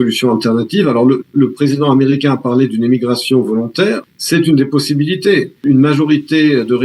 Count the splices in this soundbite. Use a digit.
2